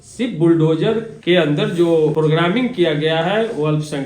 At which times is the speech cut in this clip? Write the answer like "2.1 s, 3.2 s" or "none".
1.1 s, 2.1 s